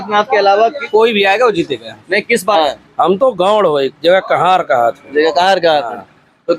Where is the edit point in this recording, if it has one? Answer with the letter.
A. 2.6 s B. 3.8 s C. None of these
A